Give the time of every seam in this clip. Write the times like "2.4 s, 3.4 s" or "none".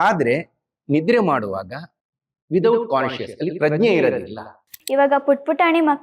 4.7 s